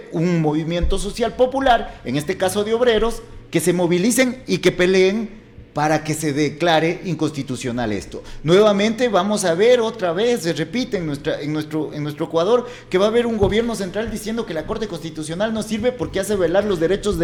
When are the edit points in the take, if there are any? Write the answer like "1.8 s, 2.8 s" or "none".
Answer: none